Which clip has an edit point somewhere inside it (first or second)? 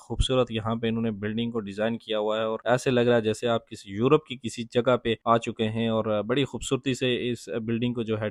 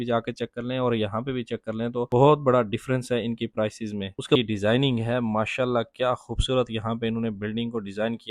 second